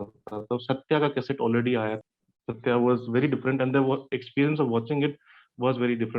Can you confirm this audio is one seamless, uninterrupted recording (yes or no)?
no